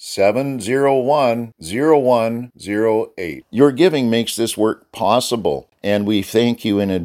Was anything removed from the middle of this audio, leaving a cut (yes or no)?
yes